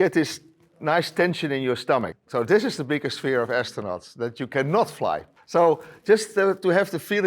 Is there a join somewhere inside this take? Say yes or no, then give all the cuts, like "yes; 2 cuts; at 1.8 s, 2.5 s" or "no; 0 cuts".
yes; 2 cuts; at 2.2 s, 5.3 s